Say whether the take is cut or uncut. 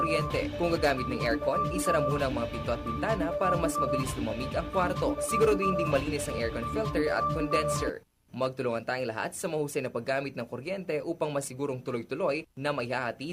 uncut